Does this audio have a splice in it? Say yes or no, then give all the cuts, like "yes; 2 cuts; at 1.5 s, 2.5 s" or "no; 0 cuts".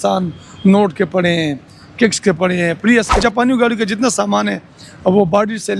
yes; 1 cut; at 3.2 s